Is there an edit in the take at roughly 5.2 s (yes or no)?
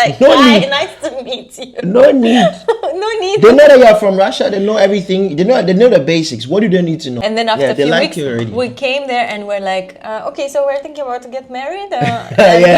no